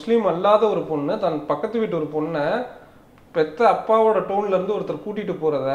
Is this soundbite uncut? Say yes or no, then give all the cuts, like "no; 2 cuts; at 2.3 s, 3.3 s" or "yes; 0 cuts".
yes; 0 cuts